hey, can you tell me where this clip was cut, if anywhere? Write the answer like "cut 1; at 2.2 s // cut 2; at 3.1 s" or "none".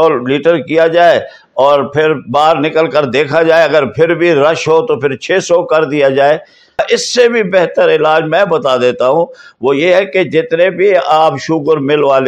cut 1; at 6.8 s